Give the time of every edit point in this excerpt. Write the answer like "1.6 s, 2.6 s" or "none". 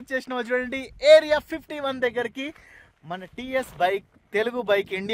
none